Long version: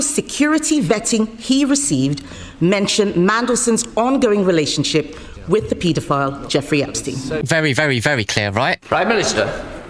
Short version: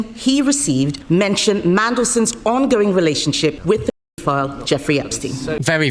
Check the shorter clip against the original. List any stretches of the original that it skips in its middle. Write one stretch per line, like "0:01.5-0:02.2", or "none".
0:02.2-0:02.5
0:05.1-0:05.4